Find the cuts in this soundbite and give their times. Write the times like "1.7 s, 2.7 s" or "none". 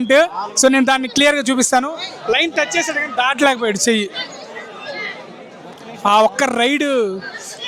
none